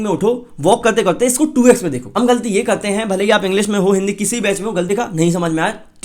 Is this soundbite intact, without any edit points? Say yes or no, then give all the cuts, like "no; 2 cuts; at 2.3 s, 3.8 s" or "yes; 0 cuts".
no; 2 cuts; at 2.0 s, 4.9 s